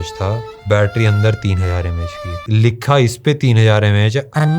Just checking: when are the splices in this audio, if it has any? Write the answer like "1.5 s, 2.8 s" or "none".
none